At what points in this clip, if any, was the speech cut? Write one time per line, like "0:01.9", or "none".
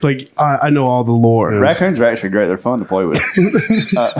0:01.5